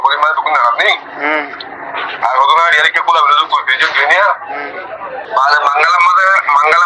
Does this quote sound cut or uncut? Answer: cut